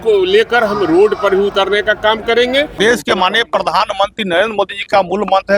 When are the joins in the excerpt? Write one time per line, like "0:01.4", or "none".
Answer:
0:02.8